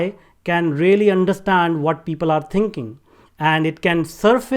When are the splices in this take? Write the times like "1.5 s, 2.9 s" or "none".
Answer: none